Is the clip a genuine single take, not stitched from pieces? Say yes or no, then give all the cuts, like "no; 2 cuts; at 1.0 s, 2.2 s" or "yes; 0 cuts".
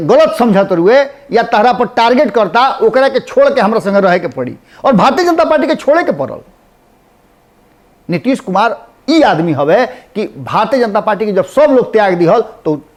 yes; 0 cuts